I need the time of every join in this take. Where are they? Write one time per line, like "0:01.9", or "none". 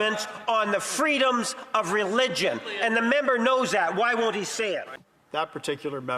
0:04.9